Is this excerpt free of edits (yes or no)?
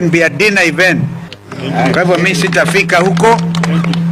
no